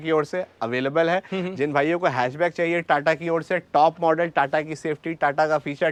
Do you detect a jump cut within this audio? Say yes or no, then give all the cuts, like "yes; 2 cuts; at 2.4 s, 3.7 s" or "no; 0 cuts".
no; 0 cuts